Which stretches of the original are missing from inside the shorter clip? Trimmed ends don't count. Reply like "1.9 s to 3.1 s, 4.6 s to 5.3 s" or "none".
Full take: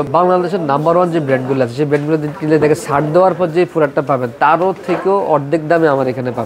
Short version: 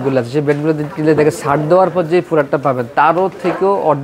none